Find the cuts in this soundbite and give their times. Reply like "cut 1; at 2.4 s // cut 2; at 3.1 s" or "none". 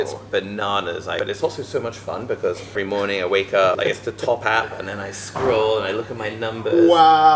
cut 1; at 1.2 s // cut 2; at 2.8 s // cut 3; at 3.8 s

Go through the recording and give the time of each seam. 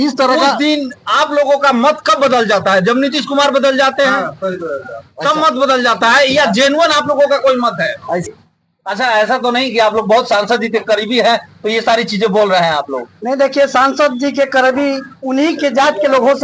cut 1; at 8.4 s

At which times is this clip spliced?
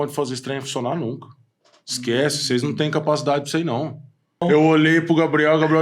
cut 1; at 4.4 s

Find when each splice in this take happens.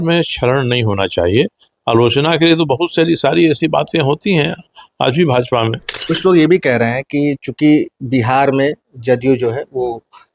cut 1; at 5.9 s

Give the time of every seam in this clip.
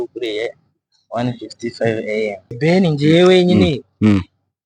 cut 1; at 2.4 s

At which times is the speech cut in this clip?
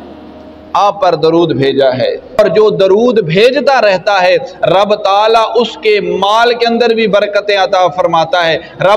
cut 1; at 2.4 s

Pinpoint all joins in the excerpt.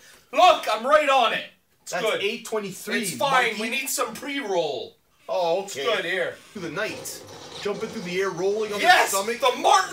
cut 1; at 6.5 s

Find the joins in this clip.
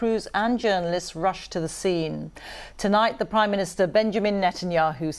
cut 1; at 1.0 s

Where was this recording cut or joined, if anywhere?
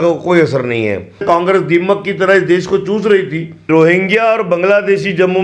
cut 1; at 1.2 s // cut 2; at 3.7 s

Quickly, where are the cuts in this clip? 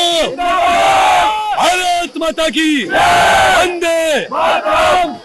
none

